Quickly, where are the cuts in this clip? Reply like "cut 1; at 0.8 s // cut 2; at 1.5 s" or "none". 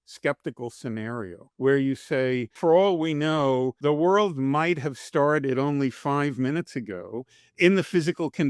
cut 1; at 1.4 s // cut 2; at 2.5 s // cut 3; at 3.7 s